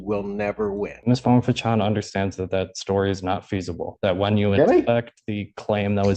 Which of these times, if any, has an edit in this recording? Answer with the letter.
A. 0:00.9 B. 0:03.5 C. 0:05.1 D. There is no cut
A